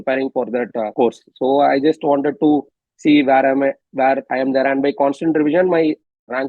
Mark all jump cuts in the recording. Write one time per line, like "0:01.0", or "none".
none